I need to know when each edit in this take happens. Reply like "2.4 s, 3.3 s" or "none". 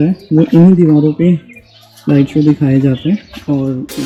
none